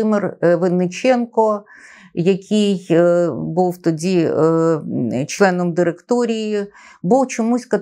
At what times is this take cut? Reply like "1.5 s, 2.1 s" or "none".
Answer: none